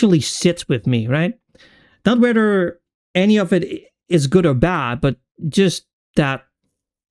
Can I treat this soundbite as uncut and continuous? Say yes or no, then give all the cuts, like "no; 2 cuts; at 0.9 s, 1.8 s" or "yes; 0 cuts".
yes; 0 cuts